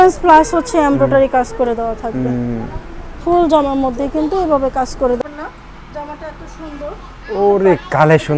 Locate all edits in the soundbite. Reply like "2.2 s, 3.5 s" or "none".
5.2 s